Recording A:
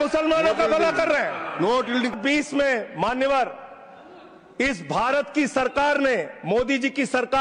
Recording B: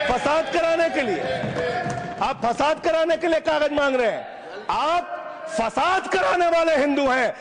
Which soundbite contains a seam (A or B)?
A